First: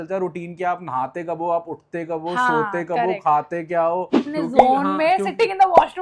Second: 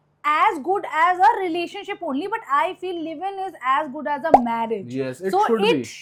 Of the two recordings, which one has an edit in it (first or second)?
first